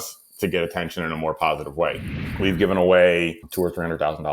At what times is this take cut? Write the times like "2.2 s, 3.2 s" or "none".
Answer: 2.1 s, 3.4 s